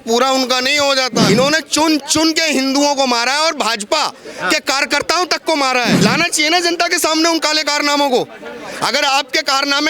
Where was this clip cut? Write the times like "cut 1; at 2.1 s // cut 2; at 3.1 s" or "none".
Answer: cut 1; at 1.3 s // cut 2; at 5.9 s